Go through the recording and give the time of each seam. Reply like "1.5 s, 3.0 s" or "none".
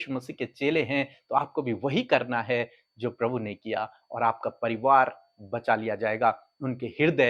none